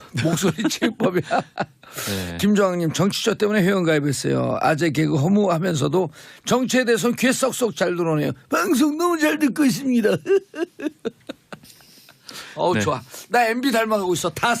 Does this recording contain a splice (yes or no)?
no